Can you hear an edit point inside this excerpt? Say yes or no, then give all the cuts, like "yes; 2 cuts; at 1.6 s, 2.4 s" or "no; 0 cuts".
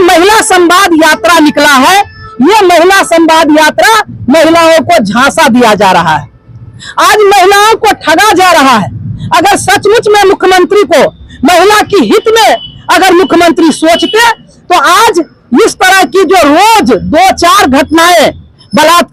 no; 0 cuts